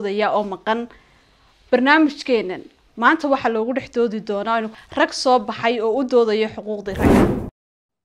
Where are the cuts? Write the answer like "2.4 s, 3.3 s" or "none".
7.0 s